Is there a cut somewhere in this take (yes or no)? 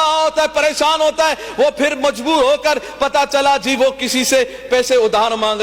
no